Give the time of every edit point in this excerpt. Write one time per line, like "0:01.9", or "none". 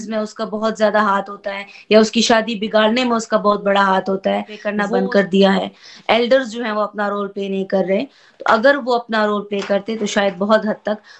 0:04.8